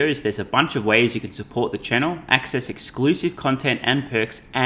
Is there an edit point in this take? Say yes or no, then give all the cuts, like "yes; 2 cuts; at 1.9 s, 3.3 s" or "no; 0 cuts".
no; 0 cuts